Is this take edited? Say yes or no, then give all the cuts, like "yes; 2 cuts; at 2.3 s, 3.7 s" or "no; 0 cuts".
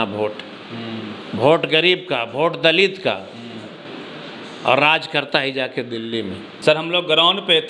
no; 0 cuts